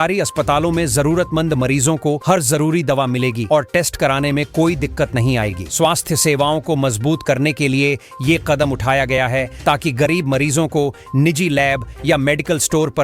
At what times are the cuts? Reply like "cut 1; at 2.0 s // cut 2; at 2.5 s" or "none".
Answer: none